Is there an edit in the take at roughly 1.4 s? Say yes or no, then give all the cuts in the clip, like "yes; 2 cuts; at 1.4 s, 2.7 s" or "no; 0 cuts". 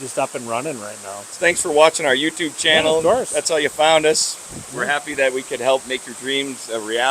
yes; 2 cuts; at 1.4 s, 5.8 s